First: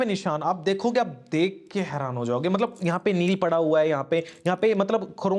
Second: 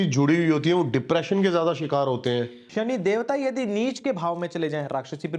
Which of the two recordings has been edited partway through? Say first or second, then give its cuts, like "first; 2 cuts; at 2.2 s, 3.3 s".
second; 1 cut; at 2.6 s